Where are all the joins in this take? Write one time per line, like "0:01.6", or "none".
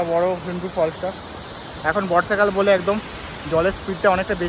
none